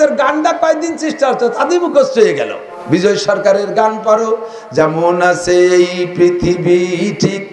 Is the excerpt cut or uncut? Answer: cut